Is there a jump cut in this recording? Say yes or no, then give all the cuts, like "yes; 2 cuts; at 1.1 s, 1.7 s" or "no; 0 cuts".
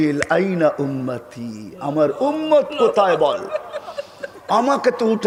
no; 0 cuts